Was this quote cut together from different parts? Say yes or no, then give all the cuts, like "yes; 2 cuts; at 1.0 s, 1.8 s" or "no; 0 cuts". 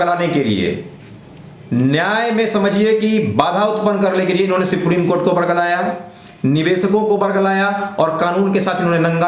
no; 0 cuts